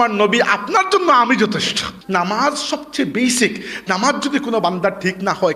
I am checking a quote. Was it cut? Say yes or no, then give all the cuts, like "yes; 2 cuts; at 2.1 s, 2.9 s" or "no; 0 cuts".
yes; 1 cut; at 1.9 s